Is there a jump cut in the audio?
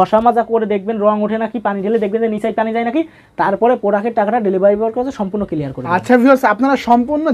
no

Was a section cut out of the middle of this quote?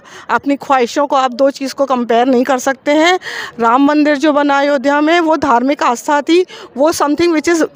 no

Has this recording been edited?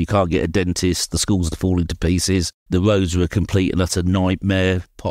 yes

